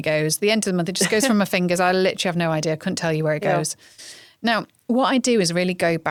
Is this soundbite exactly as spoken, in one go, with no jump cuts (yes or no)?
yes